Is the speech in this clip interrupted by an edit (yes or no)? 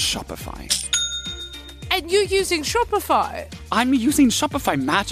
yes